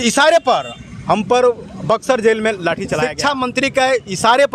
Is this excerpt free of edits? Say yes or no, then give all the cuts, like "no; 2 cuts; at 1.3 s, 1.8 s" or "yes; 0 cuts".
no; 1 cut; at 3.0 s